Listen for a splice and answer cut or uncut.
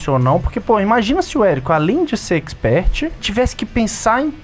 cut